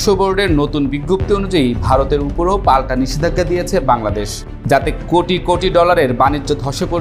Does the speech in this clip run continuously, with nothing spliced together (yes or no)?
yes